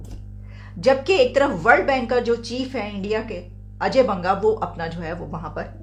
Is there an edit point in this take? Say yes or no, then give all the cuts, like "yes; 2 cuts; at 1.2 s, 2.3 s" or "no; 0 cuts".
no; 0 cuts